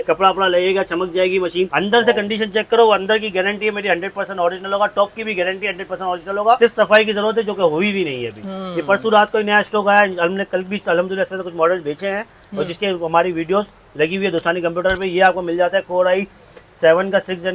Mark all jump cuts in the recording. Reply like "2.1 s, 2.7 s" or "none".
none